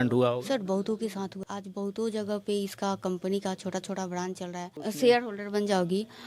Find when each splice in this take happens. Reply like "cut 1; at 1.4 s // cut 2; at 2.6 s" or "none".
cut 1; at 1.4 s // cut 2; at 4.8 s